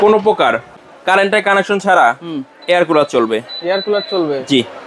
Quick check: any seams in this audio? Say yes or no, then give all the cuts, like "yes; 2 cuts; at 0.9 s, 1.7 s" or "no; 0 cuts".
no; 0 cuts